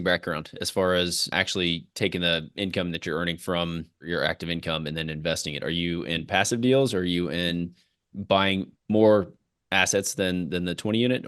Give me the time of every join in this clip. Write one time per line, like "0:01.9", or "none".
0:01.3
0:04.0